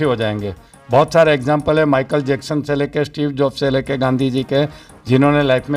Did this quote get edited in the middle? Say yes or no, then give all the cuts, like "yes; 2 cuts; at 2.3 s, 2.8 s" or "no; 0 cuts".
no; 0 cuts